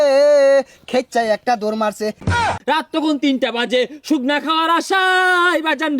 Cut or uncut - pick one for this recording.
cut